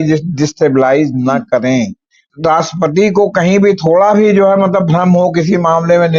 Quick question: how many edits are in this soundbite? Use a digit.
1